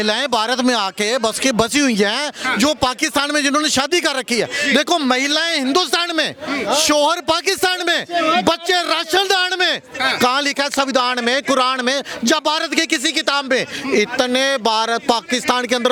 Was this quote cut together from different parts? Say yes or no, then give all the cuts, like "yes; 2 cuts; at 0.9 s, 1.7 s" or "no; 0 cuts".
no; 0 cuts